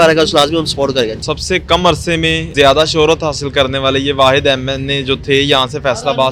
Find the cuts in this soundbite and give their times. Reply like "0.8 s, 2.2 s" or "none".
1.2 s, 2.5 s

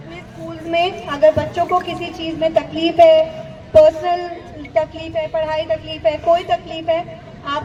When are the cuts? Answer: none

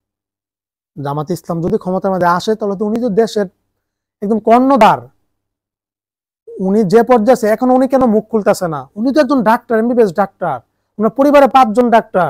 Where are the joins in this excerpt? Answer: none

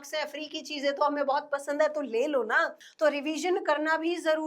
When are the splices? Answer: 2.8 s

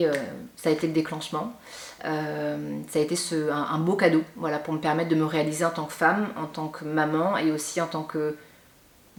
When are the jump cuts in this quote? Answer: none

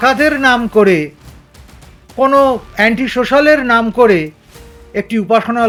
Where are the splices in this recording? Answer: none

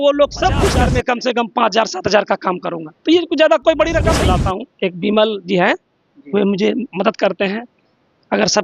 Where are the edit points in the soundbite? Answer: 0.8 s, 4.2 s

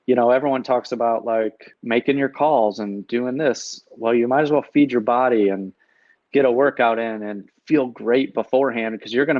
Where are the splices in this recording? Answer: 1.7 s

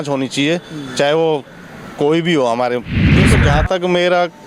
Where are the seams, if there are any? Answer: 3.1 s

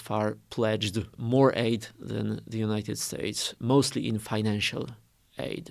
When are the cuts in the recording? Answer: 1.2 s, 3.5 s

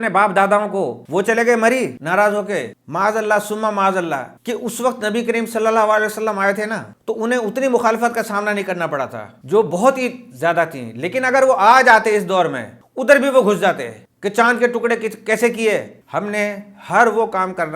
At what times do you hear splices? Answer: 1.0 s, 2.7 s, 12.8 s, 16.0 s

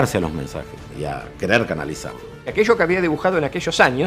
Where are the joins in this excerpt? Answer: 0.9 s, 2.4 s

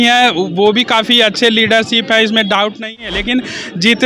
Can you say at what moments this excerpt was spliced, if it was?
3.0 s

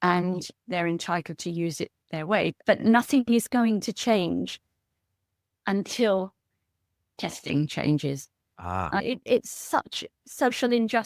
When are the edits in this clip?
2.6 s, 9.0 s

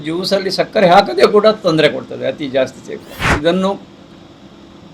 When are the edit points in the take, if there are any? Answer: 3.2 s

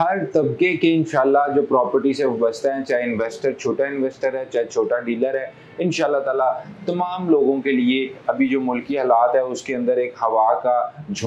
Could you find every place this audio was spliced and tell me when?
none

